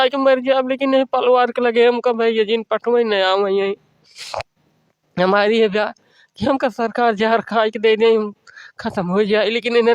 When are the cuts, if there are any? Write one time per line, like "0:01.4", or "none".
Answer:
none